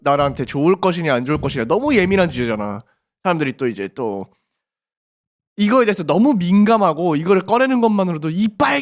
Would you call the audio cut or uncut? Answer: uncut